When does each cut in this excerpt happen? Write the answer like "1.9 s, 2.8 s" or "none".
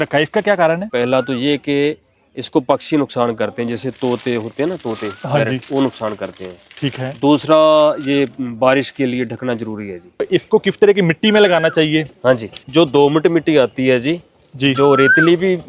0.9 s, 10.3 s, 12.5 s